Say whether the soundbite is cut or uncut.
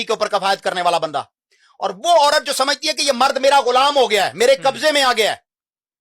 uncut